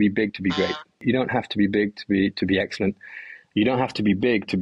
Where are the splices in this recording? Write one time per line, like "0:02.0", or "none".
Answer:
0:01.0

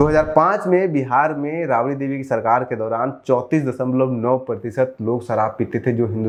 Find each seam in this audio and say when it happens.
none

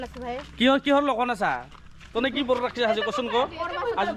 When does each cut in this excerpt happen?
none

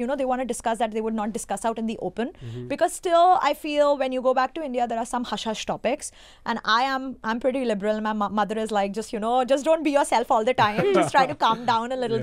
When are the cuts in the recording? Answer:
none

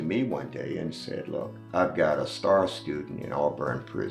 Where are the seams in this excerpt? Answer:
0:01.6

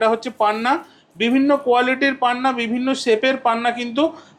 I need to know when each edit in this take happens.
none

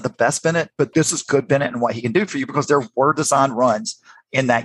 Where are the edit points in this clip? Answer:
0:00.9

